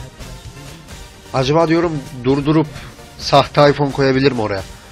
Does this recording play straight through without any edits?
no; 1 cut; at 2.6 s

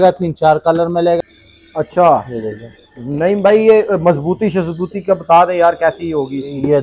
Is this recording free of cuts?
no; 1 cut; at 1.2 s

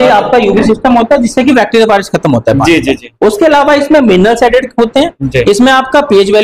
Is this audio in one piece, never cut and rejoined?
yes; 0 cuts

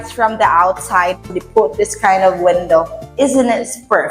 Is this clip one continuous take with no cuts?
no; 1 cut; at 1.3 s

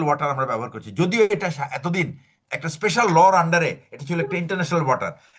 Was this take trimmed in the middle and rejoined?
yes; 1 cut; at 2.3 s

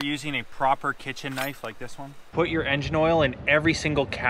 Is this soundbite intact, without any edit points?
no; 1 cut; at 2.3 s

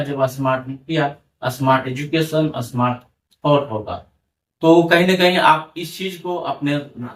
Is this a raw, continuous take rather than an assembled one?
yes; 0 cuts

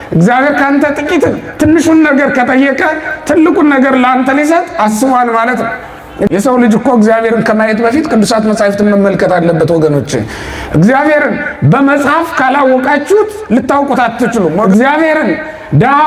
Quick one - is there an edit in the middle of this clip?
yes; 2 cuts; at 6.3 s, 14.6 s

